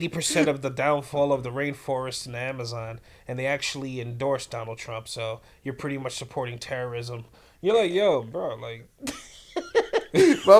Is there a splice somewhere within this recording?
no; 0 cuts

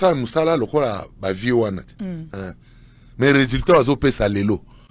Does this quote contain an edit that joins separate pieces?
no; 0 cuts

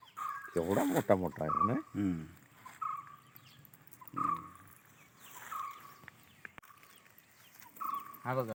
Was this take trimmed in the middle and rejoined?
no; 0 cuts

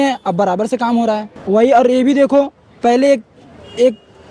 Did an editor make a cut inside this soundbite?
yes; 1 cut; at 1.3 s

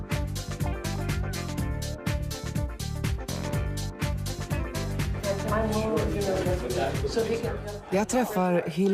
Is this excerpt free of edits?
no; 1 cut; at 4.5 s

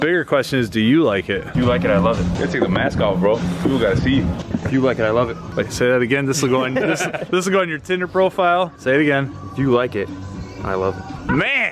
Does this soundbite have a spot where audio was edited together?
no; 0 cuts

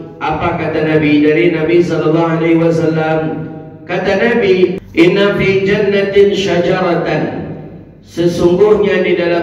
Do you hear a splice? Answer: yes; 1 cut; at 4.8 s

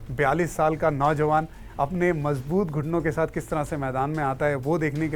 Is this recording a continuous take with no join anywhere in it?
yes; 0 cuts

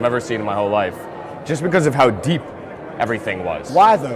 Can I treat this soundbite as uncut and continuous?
yes; 0 cuts

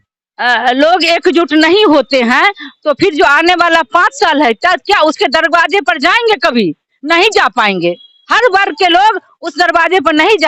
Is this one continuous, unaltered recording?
yes; 0 cuts

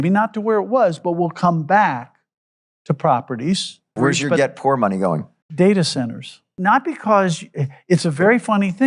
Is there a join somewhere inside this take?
yes; 3 cuts; at 4.0 s, 5.4 s, 6.5 s

